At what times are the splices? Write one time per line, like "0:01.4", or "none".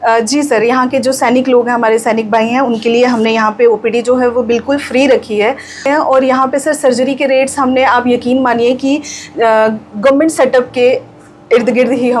0:05.8